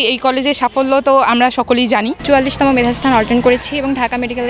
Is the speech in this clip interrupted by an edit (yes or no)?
yes